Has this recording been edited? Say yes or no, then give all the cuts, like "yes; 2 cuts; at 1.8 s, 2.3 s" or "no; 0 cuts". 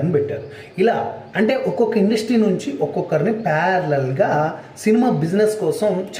no; 0 cuts